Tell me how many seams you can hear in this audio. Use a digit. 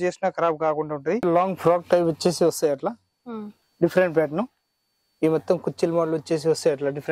1